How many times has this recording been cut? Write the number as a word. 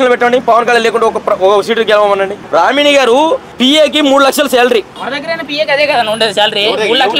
three